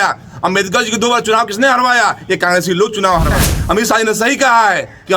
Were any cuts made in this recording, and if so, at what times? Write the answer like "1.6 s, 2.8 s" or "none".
3.5 s